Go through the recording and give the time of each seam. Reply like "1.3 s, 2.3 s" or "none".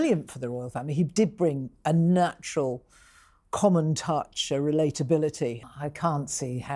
5.6 s

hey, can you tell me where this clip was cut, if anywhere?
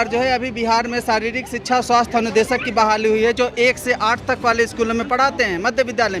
none

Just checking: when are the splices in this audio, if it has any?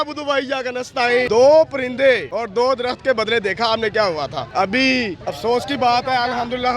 1.3 s, 2.3 s, 4.7 s

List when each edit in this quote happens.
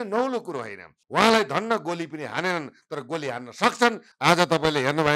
1.0 s, 4.1 s

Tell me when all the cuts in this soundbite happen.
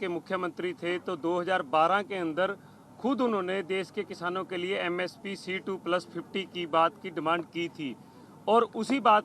none

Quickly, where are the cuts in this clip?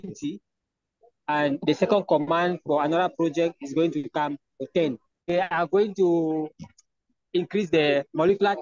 5.1 s

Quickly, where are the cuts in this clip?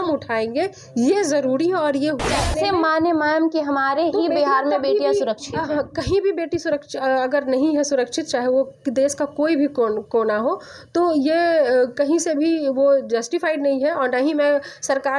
2.3 s

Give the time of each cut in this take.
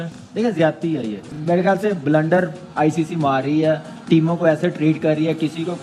1.3 s

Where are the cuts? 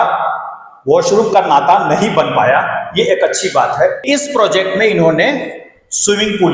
4.0 s

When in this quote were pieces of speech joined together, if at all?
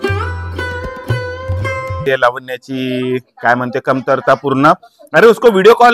2.0 s

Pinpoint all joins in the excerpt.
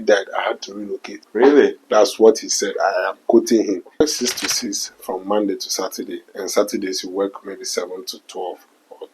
1.1 s, 4.1 s

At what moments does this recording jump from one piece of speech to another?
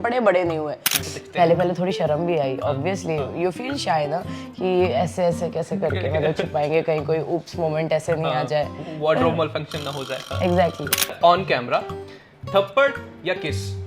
0.9 s, 11.2 s

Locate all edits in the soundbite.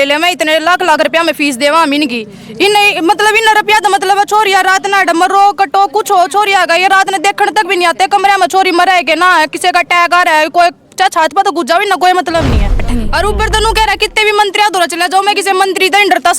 12.8 s

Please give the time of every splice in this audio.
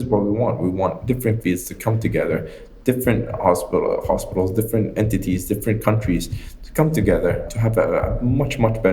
7.5 s

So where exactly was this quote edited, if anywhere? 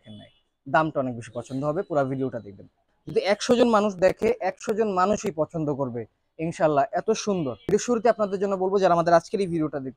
3.0 s, 7.6 s

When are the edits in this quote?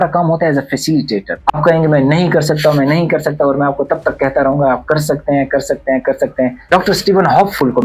1.6 s, 6.7 s

